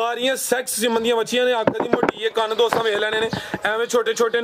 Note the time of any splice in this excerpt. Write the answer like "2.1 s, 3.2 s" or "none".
none